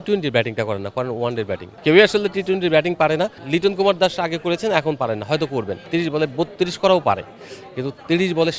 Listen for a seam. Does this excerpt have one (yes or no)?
yes